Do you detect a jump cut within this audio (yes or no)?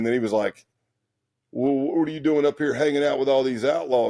no